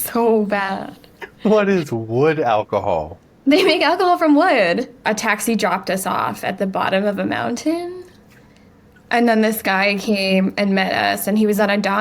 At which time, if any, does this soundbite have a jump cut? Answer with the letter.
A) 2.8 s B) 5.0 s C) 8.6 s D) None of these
B